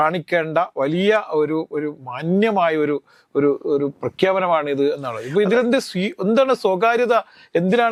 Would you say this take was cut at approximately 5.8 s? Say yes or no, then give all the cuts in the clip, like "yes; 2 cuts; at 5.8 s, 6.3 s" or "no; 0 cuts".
no; 0 cuts